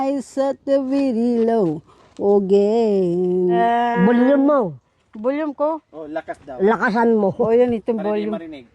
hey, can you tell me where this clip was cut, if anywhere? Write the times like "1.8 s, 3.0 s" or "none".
3.6 s